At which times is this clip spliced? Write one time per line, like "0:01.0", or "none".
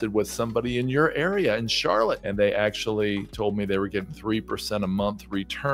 0:02.2